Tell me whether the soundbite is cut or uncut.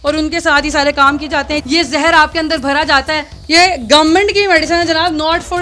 cut